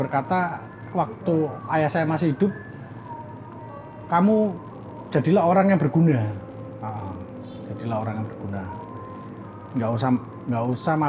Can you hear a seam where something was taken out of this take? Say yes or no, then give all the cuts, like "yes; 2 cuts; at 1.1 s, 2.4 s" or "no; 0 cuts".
no; 0 cuts